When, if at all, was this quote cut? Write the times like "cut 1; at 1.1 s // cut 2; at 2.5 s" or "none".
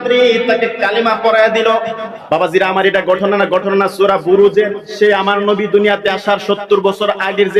cut 1; at 2.1 s